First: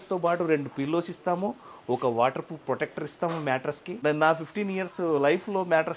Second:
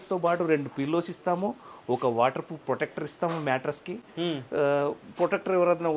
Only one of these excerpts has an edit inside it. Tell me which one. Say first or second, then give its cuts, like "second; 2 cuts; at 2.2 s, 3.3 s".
first; 1 cut; at 4.0 s